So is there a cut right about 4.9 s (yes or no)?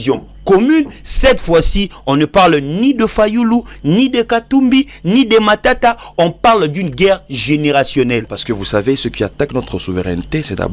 no